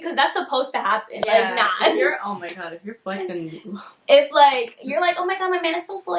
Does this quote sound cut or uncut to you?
uncut